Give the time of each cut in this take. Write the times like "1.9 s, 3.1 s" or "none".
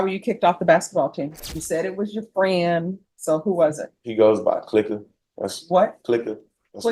1.3 s